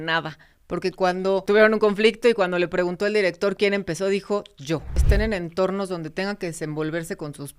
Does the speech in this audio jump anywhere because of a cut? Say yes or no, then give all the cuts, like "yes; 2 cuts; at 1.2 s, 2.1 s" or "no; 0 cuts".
yes; 2 cuts; at 1.4 s, 5.0 s